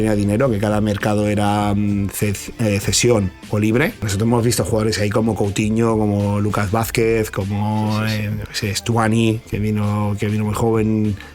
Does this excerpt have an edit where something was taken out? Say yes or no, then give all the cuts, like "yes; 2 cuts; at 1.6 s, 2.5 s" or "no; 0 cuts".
yes; 1 cut; at 4.0 s